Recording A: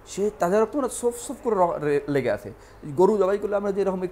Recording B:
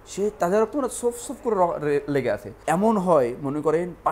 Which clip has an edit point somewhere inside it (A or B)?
B